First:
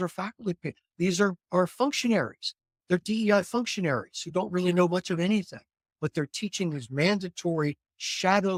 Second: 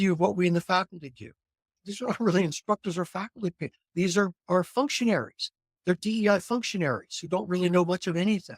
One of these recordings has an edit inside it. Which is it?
second; 1 cut; at 1.7 s

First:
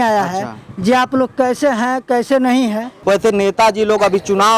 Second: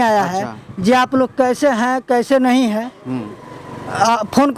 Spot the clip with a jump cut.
first; 1 cut; at 2.9 s

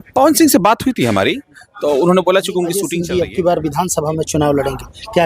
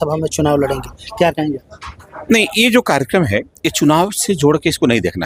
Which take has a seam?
first; 1 cut; at 2.9 s

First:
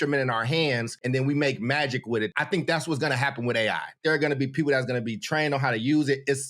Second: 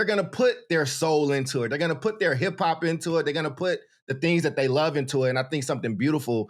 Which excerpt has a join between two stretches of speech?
first; 3 cuts; at 0.9 s, 2.3 s, 4.0 s

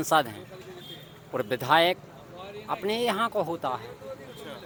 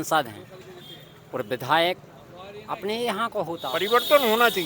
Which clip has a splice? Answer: second; 1 cut; at 3.8 s

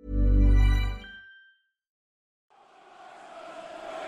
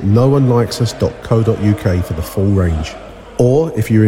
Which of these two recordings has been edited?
first; 1 cut; at 2.0 s

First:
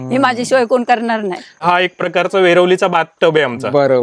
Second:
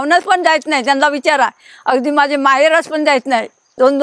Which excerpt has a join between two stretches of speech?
first; 1 cut; at 1.6 s

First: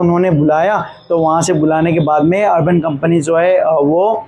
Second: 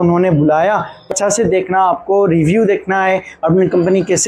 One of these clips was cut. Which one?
second; 1 cut; at 1.0 s

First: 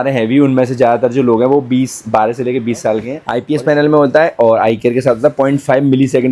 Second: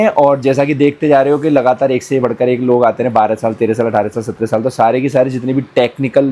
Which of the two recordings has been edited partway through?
first; 1 cut; at 3.2 s

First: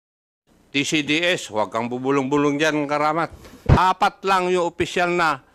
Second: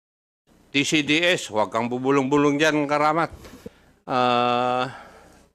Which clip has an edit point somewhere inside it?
first; 1 cut; at 3.6 s

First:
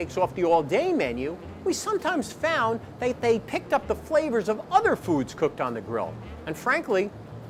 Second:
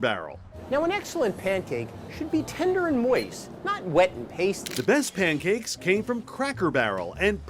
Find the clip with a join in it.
second; 1 cut; at 4.7 s

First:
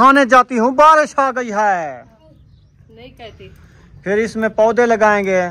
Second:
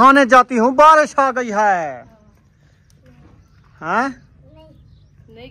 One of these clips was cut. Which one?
first; 1 cut; at 2.2 s

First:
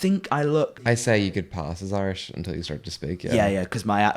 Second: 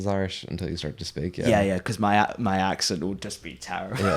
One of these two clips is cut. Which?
first; 1 cut; at 0.9 s

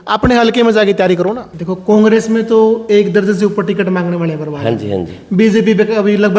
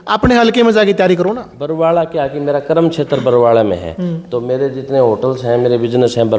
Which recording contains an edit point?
first; 1 cut; at 1.5 s

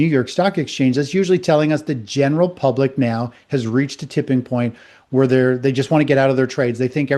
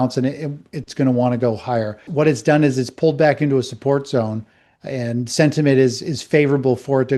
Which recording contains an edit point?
second; 1 cut; at 2.0 s

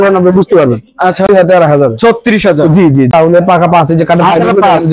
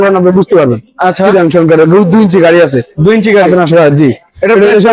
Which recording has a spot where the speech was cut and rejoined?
first; 2 cuts; at 1.3 s, 3.1 s

